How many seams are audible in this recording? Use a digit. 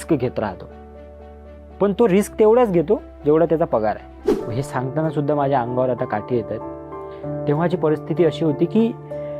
1